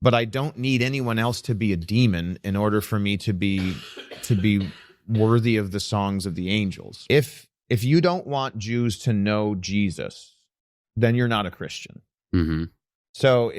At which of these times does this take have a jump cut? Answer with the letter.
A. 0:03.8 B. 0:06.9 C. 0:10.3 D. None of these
B